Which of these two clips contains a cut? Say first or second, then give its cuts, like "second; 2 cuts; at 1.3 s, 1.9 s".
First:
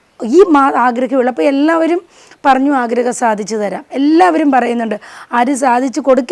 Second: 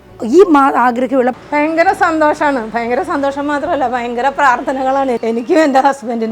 second; 2 cuts; at 1.3 s, 5.2 s